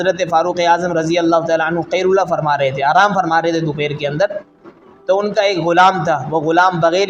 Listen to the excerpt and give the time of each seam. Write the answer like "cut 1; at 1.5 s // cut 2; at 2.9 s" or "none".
none